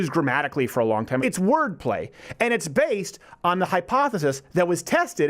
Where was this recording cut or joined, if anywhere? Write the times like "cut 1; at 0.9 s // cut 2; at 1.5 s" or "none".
cut 1; at 1.2 s